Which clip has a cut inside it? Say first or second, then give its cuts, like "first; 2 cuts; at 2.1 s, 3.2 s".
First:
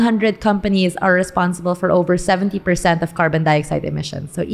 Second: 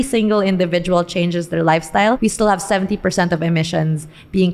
second; 1 cut; at 2.2 s